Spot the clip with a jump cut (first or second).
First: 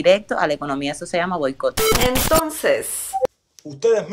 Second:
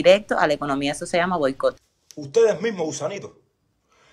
second